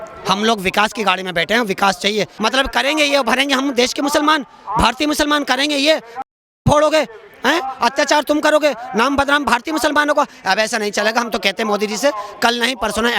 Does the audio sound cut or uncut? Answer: cut